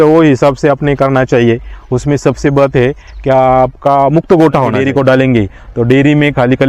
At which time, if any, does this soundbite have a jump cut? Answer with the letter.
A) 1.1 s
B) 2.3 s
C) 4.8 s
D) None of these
C